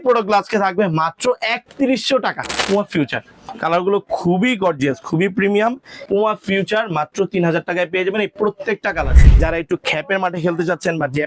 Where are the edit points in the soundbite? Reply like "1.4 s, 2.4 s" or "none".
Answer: 2.9 s, 6.0 s, 9.2 s